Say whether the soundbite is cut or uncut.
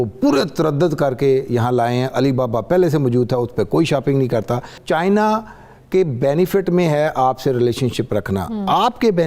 cut